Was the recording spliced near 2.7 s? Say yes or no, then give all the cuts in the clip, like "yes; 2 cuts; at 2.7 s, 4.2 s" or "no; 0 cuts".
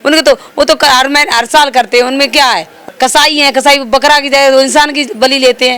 yes; 1 cut; at 2.7 s